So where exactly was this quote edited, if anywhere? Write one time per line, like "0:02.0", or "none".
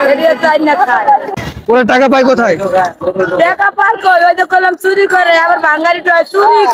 none